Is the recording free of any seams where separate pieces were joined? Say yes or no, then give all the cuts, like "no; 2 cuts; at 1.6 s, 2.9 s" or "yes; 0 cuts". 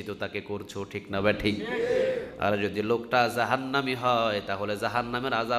yes; 0 cuts